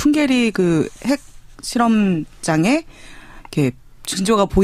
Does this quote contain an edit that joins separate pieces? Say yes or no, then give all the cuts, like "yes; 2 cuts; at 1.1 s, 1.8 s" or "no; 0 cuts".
yes; 1 cut; at 1.6 s